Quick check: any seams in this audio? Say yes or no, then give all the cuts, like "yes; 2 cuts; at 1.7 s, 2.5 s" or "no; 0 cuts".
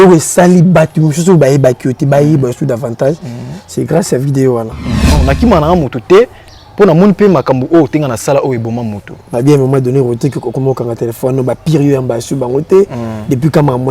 yes; 1 cut; at 5.2 s